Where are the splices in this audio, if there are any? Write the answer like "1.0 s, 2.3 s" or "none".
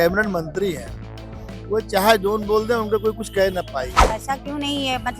4.0 s